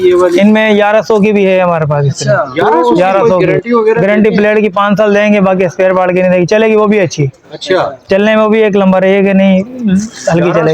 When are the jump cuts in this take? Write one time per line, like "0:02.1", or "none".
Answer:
0:03.3

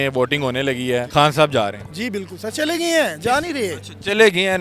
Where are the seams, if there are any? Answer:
0:01.1

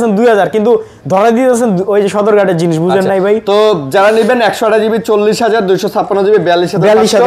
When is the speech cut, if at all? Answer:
none

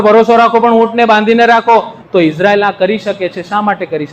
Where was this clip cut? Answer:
0:01.9

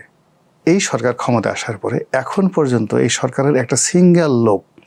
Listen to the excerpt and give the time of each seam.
none

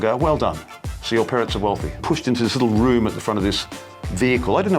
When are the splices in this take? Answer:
0:02.0

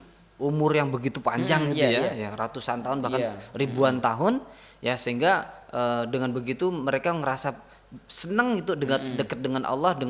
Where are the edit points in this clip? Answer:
none

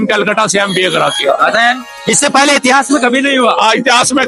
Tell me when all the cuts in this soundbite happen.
none

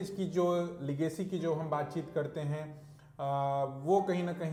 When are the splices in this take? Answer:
none

